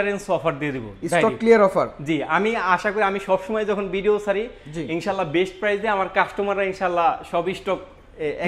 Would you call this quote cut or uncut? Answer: uncut